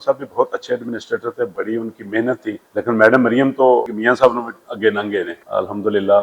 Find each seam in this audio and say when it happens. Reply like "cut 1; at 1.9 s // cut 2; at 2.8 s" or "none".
cut 1; at 1.5 s // cut 2; at 2.6 s // cut 3; at 4.3 s // cut 4; at 5.4 s